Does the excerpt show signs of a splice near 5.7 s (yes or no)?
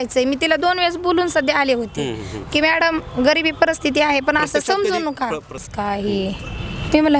yes